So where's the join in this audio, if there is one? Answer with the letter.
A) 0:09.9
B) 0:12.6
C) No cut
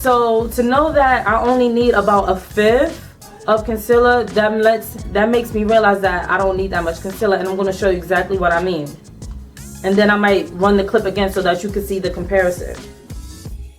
B